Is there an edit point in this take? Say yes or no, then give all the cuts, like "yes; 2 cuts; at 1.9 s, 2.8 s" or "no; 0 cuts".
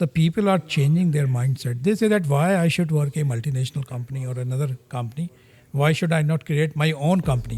no; 0 cuts